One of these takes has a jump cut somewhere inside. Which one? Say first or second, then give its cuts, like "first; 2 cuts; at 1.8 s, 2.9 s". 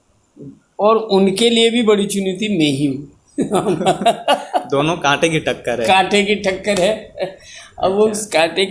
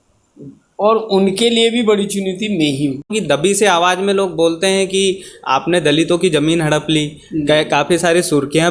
second; 1 cut; at 3.1 s